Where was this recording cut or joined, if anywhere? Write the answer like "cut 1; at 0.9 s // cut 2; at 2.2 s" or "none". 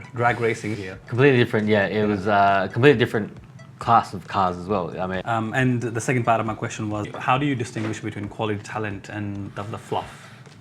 cut 1; at 0.7 s // cut 2; at 5.2 s // cut 3; at 7.1 s